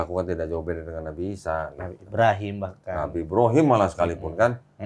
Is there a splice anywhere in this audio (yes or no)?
no